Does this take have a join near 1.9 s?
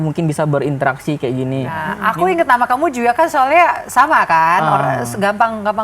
yes; 1 cut; at 1.9 s

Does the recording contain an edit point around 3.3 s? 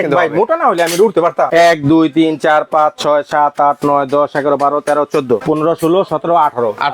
no; 2 cuts; at 1.5 s, 5.4 s

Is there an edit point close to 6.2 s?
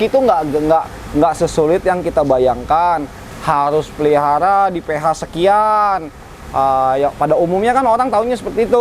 no; 0 cuts

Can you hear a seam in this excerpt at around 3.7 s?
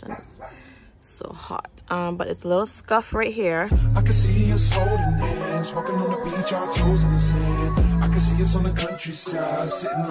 yes; 1 cut; at 3.7 s

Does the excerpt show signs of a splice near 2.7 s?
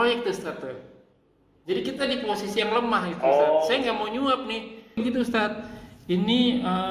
no; 1 cut; at 5.0 s

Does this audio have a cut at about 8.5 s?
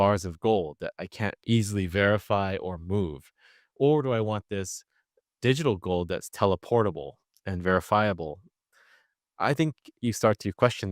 yes; 1 cut; at 8.5 s

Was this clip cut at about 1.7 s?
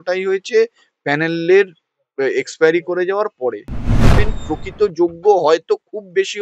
no; 1 cut; at 4.1 s

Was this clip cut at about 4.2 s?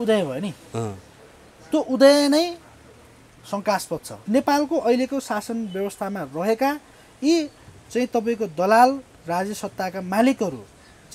yes; 1 cut; at 4.2 s

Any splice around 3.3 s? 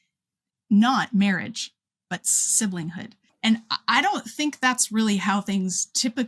yes; 1 cut; at 3.3 s

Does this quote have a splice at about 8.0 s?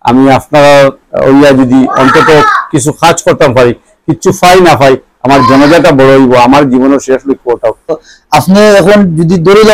yes; 1 cut; at 8.0 s

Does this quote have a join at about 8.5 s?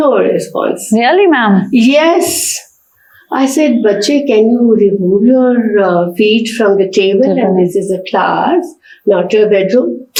no; 0 cuts

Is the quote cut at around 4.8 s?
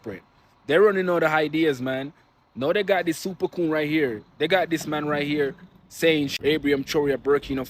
no; 1 cut; at 6.3 s

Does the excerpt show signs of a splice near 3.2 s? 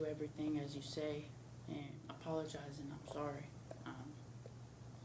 no; 1 cut; at 2.0 s

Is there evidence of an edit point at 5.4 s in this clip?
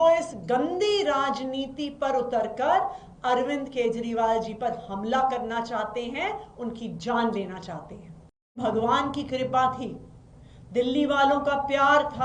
no; 1 cut; at 8.6 s

